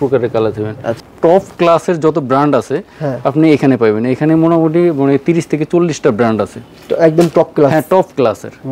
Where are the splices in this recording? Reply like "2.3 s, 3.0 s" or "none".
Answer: 1.0 s